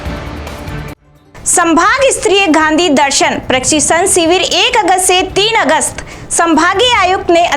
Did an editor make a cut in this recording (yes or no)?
yes